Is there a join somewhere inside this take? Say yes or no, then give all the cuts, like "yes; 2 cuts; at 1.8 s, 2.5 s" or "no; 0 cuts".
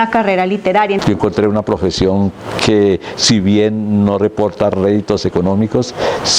yes; 1 cut; at 1.0 s